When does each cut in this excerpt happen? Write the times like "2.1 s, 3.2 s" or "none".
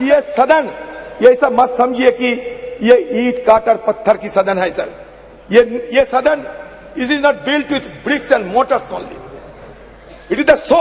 none